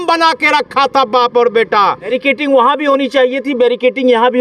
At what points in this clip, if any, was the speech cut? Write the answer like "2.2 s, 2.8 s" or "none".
2.1 s